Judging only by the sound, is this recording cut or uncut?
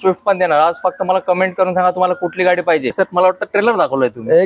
cut